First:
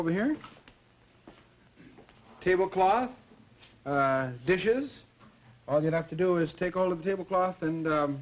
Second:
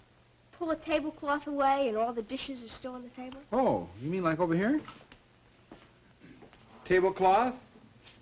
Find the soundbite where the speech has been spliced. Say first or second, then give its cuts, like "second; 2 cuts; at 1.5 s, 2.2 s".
second; 1 cut; at 1.8 s